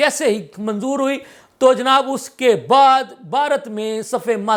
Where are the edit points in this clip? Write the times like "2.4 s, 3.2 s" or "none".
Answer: none